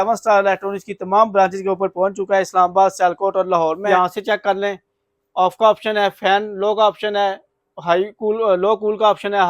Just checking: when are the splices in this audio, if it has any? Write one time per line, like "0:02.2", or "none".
0:03.8